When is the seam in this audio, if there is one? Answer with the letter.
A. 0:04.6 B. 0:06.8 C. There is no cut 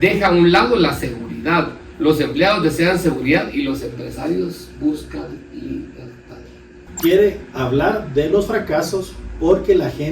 B